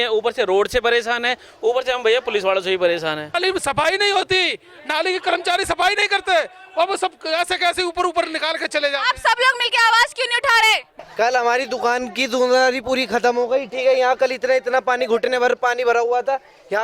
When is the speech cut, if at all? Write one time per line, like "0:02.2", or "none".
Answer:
0:03.3
0:10.9